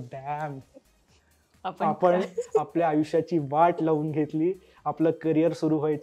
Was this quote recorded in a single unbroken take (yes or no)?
yes